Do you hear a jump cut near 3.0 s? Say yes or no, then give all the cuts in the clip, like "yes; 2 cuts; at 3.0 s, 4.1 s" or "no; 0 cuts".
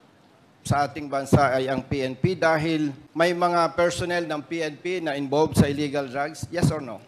yes; 1 cut; at 3.0 s